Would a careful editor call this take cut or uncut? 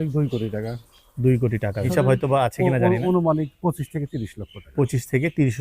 cut